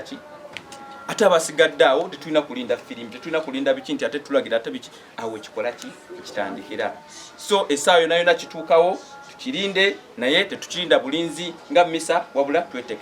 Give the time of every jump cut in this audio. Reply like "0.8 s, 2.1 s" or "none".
none